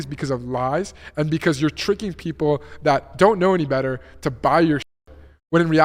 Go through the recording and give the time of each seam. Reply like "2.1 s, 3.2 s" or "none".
none

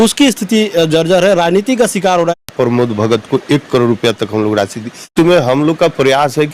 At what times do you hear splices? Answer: 2.4 s, 5.1 s

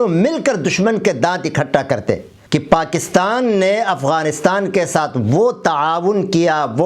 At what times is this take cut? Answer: 2.3 s

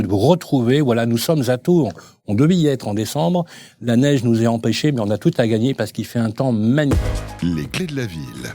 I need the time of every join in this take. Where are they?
none

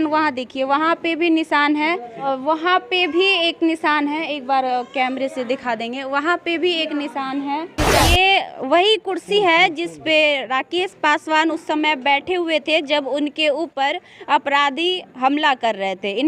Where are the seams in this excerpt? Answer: 2.2 s, 8.0 s

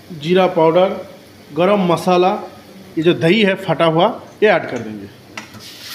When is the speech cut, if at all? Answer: 2.8 s

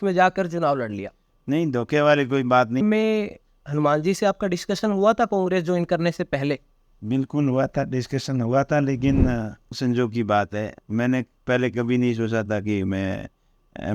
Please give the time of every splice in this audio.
2.8 s, 9.8 s

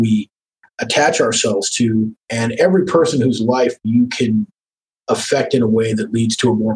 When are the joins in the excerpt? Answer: 2.2 s

